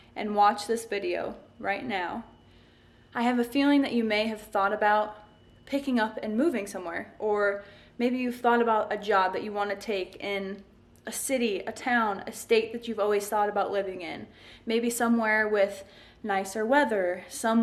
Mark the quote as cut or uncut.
uncut